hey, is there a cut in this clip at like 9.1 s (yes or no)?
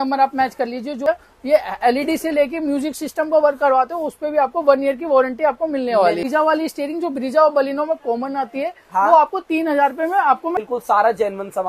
no